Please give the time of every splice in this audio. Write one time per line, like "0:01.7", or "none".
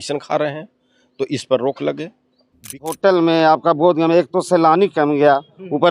0:02.9